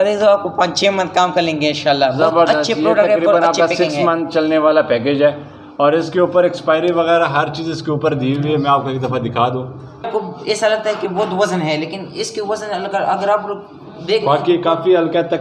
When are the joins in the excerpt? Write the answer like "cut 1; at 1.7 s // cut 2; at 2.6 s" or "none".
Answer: cut 1; at 10.1 s